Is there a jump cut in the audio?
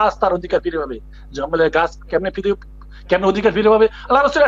no; 0 cuts

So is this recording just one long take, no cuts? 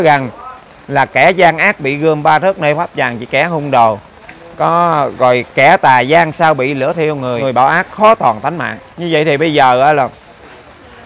no; 1 cut; at 7.4 s

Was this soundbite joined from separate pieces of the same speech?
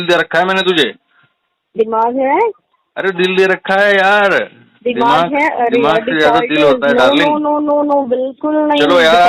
no; 0 cuts

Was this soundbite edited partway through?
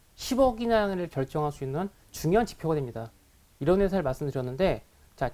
yes; 1 cut; at 3.4 s

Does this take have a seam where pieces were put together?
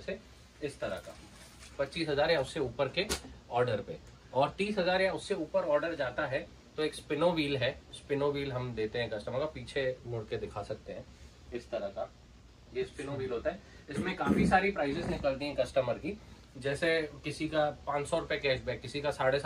no; 0 cuts

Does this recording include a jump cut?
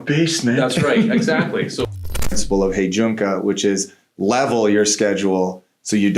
yes; 1 cut; at 2.0 s

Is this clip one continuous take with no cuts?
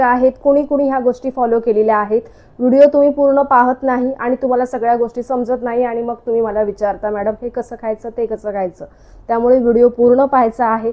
yes; 0 cuts

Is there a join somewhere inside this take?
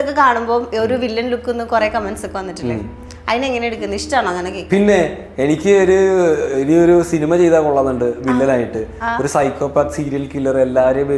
no; 0 cuts

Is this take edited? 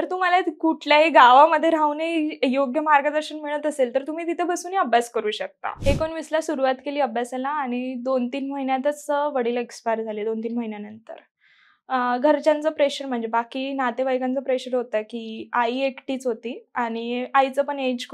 yes; 1 cut; at 5.7 s

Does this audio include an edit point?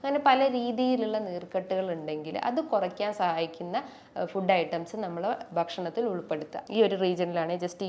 yes; 1 cut; at 6.6 s

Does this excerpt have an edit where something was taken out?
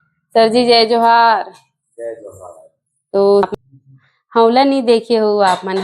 yes; 1 cut; at 3.5 s

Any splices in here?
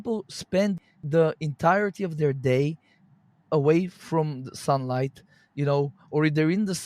yes; 1 cut; at 0.9 s

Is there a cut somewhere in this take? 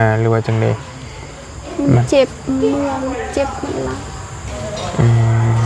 no; 0 cuts

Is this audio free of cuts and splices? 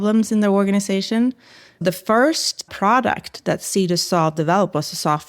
no; 2 cuts; at 1.8 s, 2.7 s

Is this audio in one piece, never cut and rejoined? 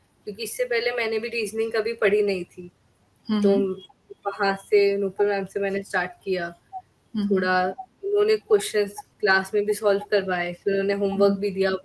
yes; 0 cuts

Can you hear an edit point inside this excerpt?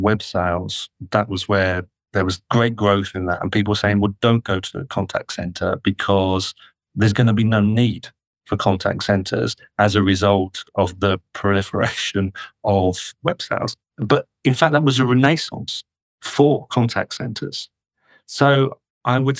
no; 0 cuts

